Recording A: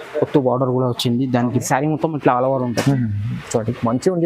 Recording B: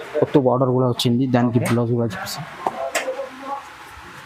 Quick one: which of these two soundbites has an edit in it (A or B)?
A